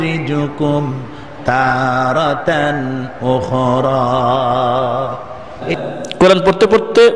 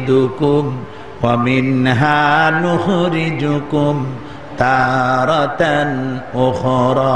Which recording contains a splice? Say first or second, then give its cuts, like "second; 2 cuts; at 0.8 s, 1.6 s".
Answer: first; 1 cut; at 5.6 s